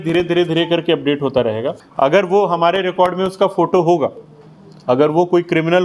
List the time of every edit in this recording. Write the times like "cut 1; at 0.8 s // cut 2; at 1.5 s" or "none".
cut 1; at 1.8 s